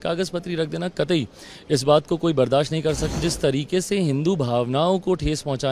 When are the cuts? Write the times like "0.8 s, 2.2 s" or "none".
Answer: 3.2 s